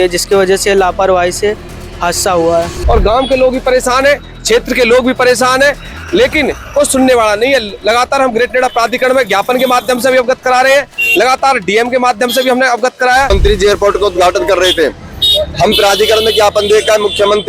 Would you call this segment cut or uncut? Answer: cut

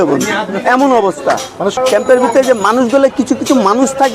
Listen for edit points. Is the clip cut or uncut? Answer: cut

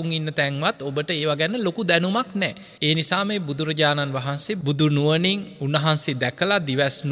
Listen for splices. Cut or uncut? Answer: cut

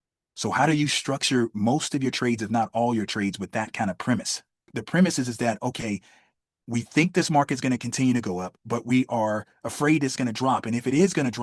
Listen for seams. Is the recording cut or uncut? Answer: cut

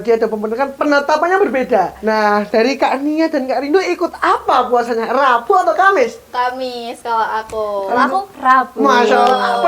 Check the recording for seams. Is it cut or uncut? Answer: cut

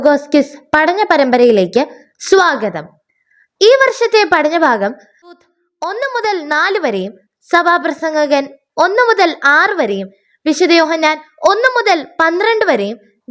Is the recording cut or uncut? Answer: cut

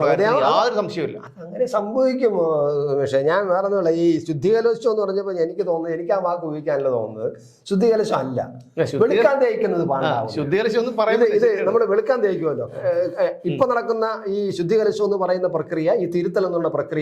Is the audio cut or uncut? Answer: uncut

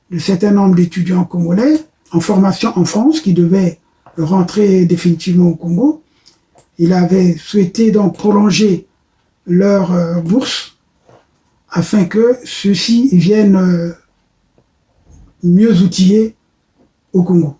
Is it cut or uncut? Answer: cut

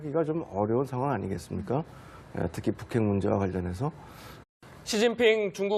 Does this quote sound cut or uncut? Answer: uncut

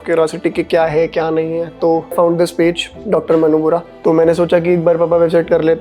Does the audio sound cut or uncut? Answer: cut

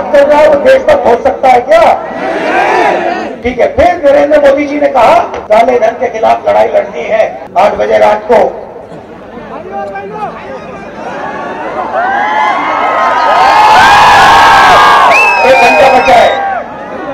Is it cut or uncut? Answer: cut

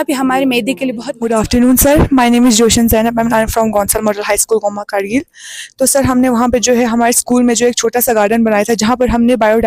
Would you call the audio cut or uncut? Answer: uncut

